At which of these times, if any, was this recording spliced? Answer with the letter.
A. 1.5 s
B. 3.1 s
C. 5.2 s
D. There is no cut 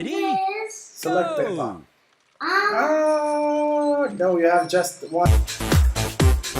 C